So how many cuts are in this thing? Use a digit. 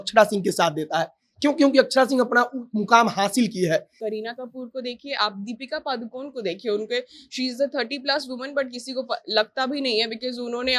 1